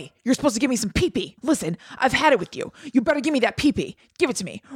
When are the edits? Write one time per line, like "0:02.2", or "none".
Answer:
0:01.3